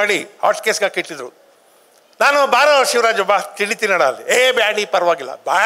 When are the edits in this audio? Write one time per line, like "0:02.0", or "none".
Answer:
none